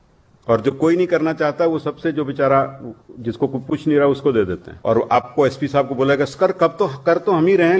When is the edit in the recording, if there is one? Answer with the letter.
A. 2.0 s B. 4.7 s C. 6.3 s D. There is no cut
B